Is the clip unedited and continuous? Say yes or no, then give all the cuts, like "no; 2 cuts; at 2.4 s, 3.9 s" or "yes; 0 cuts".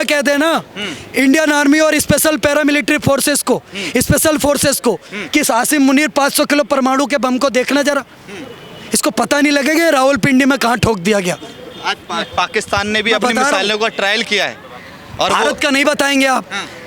yes; 0 cuts